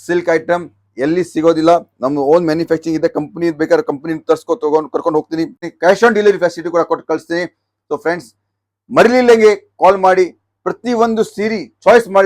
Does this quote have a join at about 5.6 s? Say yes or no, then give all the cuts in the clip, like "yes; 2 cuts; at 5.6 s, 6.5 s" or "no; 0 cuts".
yes; 1 cut; at 5.6 s